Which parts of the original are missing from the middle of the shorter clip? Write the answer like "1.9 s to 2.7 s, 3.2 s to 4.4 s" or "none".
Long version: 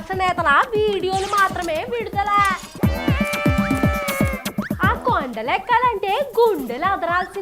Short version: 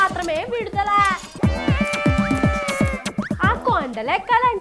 none